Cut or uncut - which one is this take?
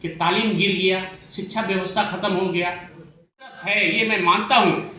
cut